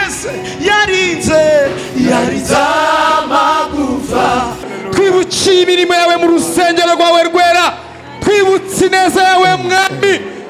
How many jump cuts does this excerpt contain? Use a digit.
1